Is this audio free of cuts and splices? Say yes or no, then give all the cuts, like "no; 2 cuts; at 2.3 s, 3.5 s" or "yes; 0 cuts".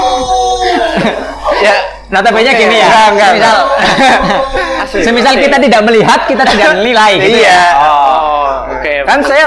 yes; 0 cuts